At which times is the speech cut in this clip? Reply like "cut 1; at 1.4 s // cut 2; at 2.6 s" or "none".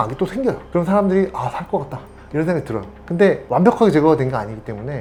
none